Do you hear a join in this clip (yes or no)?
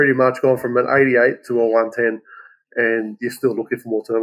no